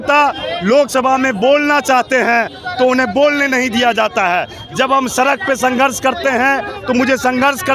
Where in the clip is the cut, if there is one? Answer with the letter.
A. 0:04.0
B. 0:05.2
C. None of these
C